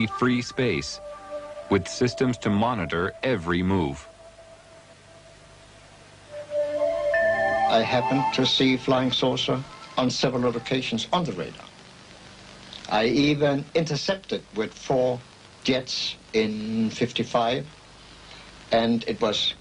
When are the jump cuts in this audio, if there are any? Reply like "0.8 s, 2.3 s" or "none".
none